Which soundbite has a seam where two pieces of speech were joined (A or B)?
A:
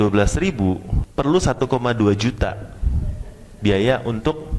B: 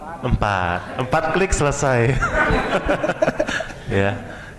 A